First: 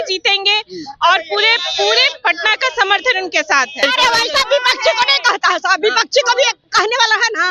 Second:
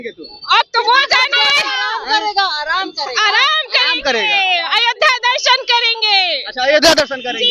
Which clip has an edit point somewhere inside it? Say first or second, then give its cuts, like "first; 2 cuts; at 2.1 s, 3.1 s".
first; 1 cut; at 3.8 s